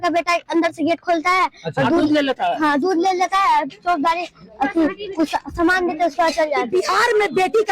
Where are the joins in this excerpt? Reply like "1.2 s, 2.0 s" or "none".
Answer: 6.6 s